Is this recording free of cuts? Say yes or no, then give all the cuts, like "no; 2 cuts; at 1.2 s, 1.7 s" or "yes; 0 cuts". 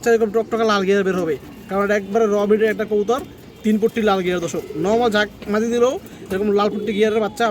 yes; 0 cuts